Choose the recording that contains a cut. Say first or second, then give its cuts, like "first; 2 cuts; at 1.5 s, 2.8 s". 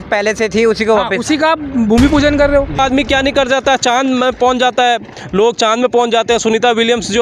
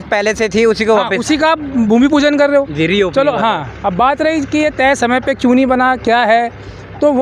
first; 1 cut; at 2.8 s